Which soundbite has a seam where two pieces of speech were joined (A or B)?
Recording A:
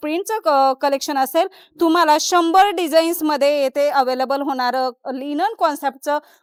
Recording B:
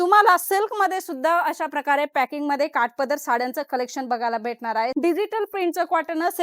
B